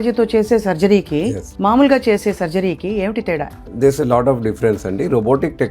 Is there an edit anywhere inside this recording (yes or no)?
yes